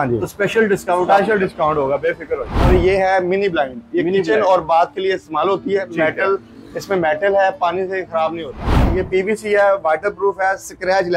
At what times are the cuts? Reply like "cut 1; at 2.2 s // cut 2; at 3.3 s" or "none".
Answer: cut 1; at 2.7 s // cut 2; at 8.9 s

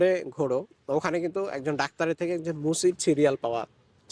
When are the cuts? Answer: none

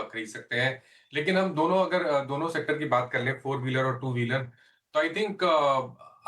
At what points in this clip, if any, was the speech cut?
cut 1; at 3.1 s

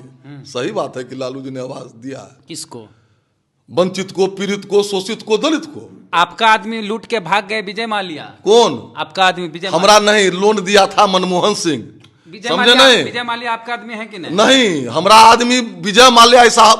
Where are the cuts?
cut 1; at 6.1 s

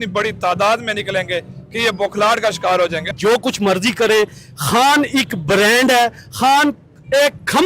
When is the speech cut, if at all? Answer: cut 1; at 3.1 s

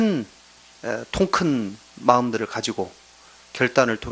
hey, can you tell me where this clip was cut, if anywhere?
cut 1; at 1.9 s

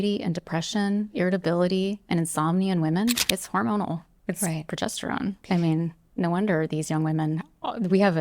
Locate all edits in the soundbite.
cut 1; at 3.2 s // cut 2; at 5.4 s

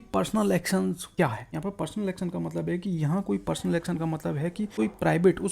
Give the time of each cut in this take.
cut 1; at 1.3 s // cut 2; at 4.7 s

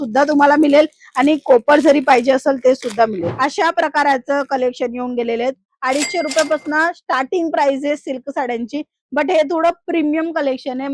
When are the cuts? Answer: cut 1; at 3.3 s

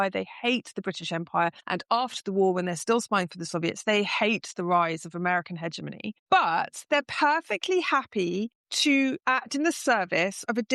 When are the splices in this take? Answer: cut 1; at 1.6 s // cut 2; at 6.1 s // cut 3; at 8.6 s

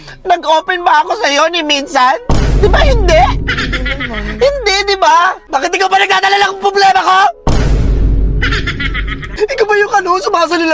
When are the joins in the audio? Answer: cut 1; at 5.4 s // cut 2; at 9.2 s

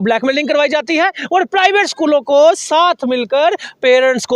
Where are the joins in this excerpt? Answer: none

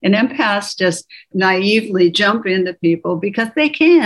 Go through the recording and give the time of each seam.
cut 1; at 1.3 s

